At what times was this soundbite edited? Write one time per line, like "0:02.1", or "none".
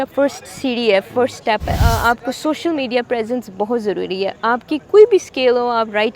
0:01.8